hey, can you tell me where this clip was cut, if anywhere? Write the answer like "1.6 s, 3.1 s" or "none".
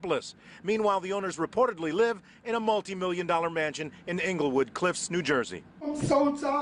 4.7 s